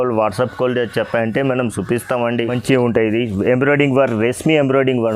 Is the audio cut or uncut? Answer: cut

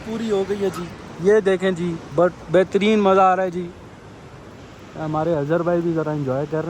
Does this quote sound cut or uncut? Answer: uncut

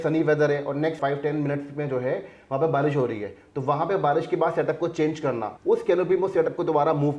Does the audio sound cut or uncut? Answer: cut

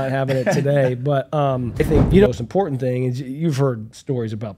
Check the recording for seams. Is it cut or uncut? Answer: cut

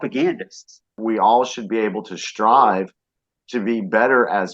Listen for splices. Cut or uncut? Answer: cut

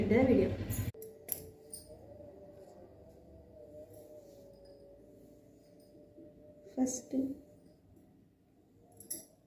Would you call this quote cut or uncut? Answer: cut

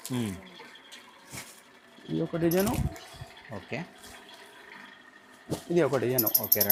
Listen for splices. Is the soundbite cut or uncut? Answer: uncut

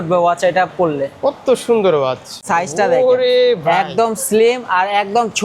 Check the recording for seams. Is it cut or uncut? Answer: cut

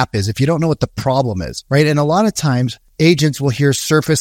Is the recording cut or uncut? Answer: cut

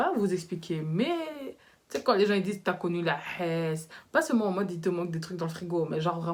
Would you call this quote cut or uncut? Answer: uncut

